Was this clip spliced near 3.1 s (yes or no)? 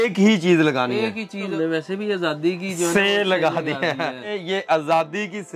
no